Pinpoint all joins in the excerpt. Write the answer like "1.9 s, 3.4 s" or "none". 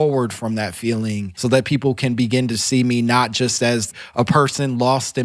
1.3 s, 3.9 s

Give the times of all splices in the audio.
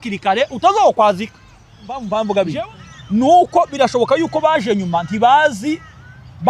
2.0 s

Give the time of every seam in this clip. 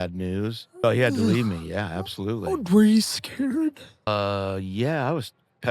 0.8 s, 4.1 s

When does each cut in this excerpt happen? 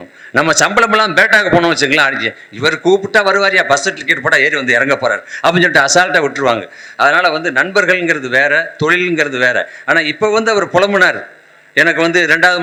none

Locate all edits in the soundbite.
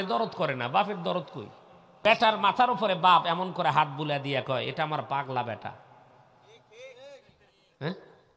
2.0 s

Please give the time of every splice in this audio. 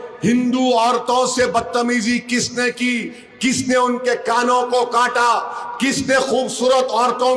none

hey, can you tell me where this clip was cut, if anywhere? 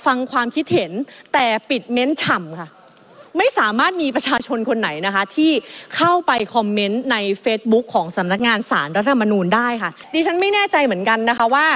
10.0 s

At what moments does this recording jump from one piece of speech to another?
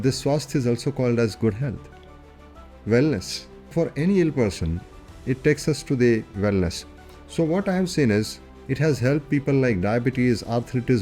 3.7 s

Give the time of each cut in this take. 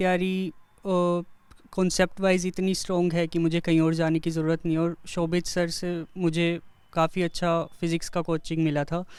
none

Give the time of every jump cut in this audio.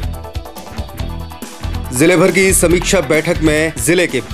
1.9 s

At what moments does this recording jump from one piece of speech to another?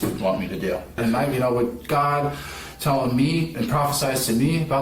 0.9 s, 3.5 s

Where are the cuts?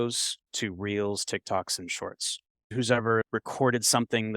2.7 s

